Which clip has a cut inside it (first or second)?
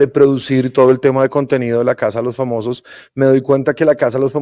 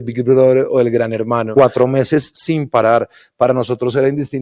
second